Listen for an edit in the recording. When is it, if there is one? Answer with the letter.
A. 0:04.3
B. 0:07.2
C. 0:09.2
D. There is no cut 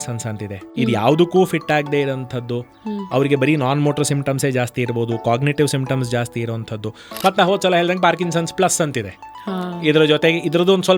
B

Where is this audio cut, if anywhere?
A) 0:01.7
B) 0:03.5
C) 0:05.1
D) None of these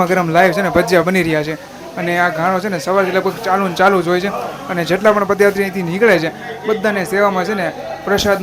D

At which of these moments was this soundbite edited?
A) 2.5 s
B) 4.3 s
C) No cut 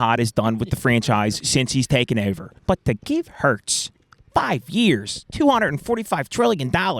A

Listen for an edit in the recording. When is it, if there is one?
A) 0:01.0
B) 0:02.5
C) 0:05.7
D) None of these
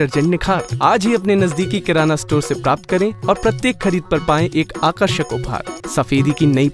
C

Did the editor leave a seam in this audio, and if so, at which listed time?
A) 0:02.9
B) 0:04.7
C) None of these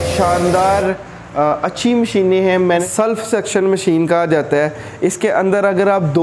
A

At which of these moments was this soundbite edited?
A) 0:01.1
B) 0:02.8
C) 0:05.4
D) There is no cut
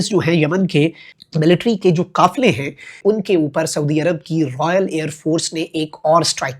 A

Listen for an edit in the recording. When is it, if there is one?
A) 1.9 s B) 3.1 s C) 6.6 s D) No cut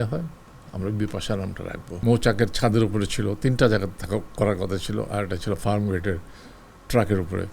A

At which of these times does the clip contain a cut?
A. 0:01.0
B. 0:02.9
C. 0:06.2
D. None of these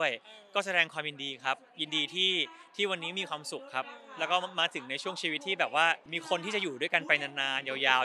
C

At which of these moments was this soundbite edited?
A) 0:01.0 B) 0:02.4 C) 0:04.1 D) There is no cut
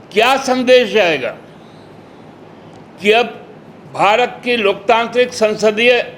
B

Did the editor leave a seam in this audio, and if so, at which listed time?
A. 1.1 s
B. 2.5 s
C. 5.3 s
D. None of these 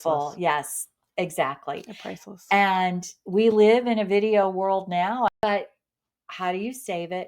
C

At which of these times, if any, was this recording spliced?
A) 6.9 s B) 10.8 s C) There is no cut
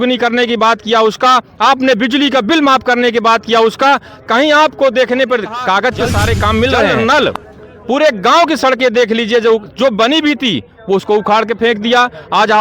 A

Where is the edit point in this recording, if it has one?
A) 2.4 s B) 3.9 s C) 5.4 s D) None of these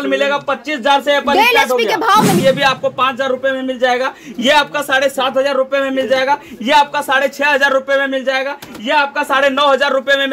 A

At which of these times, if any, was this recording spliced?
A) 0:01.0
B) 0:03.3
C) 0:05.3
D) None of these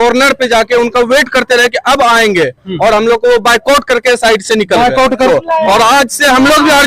C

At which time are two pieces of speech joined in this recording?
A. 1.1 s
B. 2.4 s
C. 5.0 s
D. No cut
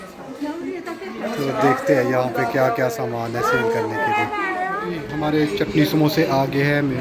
C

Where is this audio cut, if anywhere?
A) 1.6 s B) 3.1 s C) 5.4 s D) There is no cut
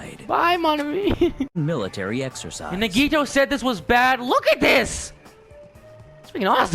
A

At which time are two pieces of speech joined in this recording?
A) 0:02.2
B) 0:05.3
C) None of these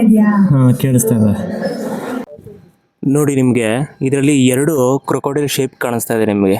A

